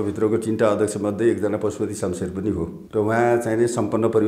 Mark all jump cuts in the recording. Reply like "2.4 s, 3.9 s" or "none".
2.8 s